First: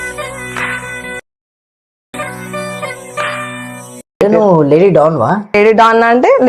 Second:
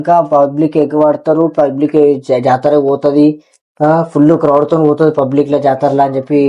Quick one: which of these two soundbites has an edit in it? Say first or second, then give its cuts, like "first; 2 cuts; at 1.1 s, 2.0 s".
first; 2 cuts; at 3.9 s, 5.5 s